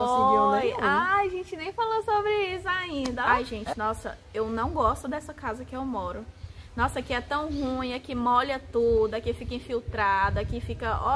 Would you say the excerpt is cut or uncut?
cut